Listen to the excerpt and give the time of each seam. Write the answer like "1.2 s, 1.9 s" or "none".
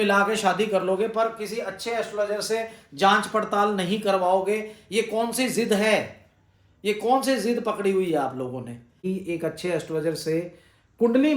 9.0 s